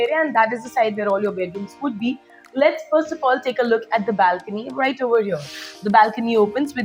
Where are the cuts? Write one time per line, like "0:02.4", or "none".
none